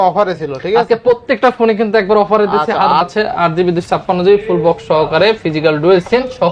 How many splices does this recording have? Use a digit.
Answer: 1